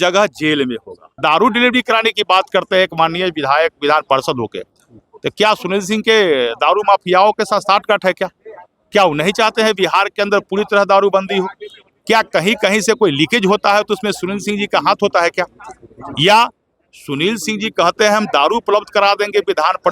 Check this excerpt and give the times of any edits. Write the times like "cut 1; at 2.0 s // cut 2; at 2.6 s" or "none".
cut 1; at 1.2 s

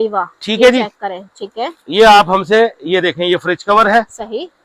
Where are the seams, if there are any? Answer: none

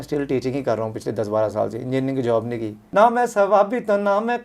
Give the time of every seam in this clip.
cut 1; at 2.7 s

